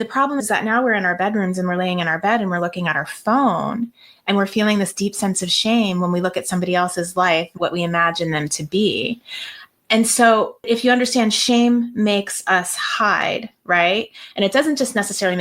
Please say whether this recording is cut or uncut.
cut